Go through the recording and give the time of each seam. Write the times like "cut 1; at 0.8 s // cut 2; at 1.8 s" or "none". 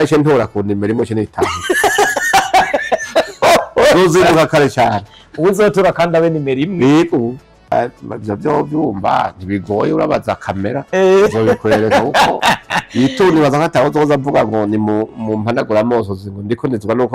cut 1; at 7.5 s